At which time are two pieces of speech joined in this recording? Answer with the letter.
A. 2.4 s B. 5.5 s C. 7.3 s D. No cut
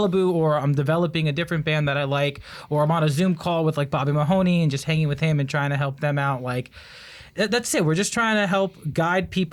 D